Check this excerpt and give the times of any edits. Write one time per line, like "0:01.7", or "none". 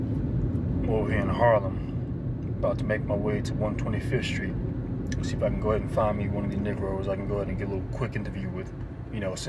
none